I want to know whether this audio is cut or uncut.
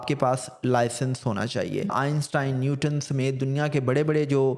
cut